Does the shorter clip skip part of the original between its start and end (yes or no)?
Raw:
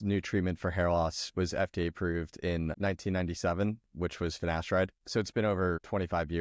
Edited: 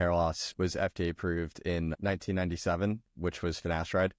no